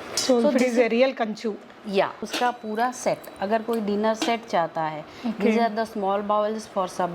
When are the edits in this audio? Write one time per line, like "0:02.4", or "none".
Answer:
0:02.2

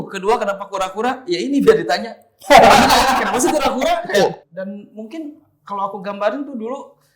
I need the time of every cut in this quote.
0:04.4

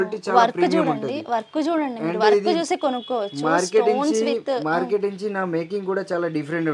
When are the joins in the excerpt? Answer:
none

